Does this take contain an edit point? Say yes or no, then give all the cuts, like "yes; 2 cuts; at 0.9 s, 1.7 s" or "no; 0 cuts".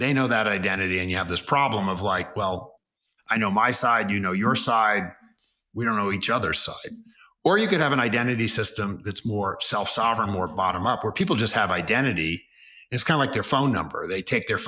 no; 0 cuts